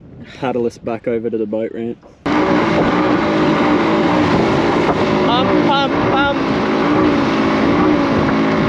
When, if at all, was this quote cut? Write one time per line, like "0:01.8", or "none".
0:02.3